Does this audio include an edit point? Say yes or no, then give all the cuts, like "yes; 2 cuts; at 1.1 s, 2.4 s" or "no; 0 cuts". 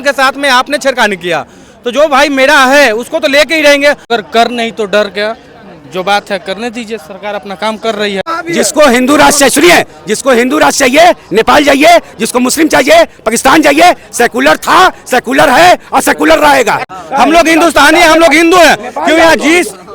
yes; 3 cuts; at 4.1 s, 8.4 s, 17.0 s